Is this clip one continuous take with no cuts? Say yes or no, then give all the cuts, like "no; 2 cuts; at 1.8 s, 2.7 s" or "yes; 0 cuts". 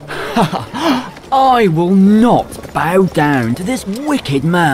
yes; 0 cuts